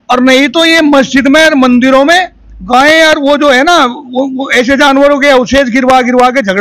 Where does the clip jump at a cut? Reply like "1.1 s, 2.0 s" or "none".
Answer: none